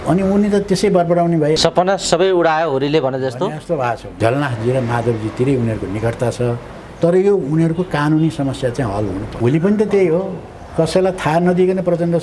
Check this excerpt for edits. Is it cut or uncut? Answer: cut